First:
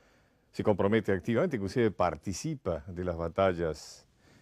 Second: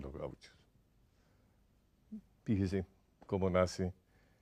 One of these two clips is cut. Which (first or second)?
first